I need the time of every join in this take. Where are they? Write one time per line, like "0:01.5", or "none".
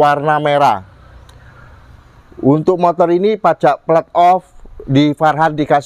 none